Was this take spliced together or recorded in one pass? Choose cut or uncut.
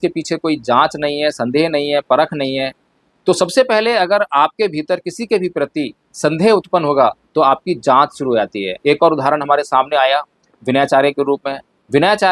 cut